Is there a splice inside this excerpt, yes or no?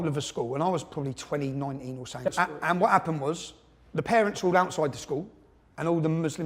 yes